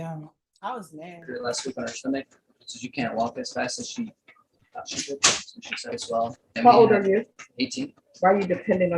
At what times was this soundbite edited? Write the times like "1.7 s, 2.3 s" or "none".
1.3 s, 6.0 s